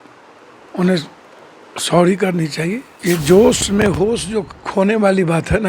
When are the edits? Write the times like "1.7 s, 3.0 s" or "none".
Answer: 2.9 s